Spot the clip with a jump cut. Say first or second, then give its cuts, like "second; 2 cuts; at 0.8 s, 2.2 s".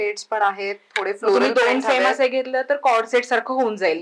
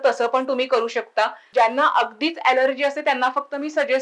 second; 1 cut; at 1.4 s